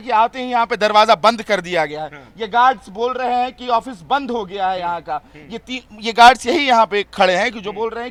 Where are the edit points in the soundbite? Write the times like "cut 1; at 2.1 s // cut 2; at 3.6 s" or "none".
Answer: none